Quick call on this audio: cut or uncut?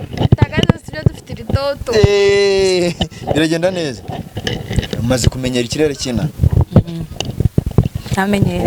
uncut